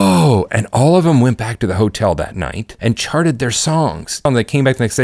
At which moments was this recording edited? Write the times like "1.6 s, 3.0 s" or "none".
2.6 s, 4.2 s